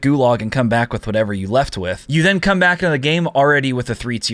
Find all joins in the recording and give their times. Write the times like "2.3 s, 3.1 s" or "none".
2.0 s